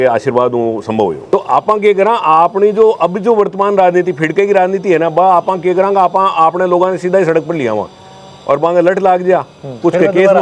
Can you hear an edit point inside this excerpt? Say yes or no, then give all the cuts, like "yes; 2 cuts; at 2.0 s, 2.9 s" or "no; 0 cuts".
yes; 1 cut; at 1.2 s